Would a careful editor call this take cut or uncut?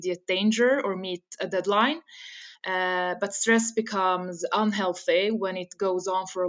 uncut